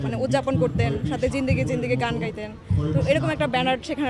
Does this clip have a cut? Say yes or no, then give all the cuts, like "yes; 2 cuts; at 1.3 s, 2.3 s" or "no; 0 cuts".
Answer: no; 0 cuts